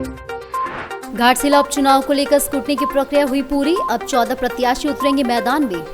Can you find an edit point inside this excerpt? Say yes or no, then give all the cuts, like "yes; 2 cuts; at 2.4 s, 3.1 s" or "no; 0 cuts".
yes; 1 cut; at 1.0 s